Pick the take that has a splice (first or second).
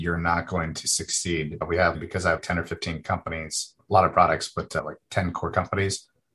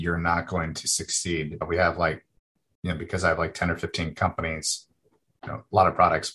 first